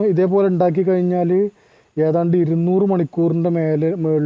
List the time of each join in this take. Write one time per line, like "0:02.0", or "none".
none